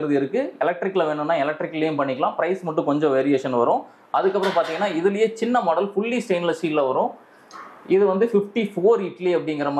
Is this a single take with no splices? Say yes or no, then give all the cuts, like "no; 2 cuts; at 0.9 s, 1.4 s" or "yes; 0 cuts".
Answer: yes; 0 cuts